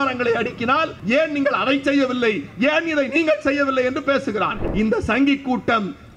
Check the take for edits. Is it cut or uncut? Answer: cut